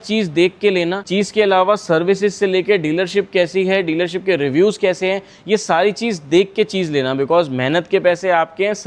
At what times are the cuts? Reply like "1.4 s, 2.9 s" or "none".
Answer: none